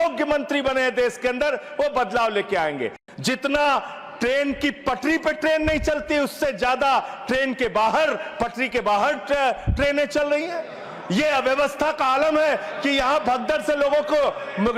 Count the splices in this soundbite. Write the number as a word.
one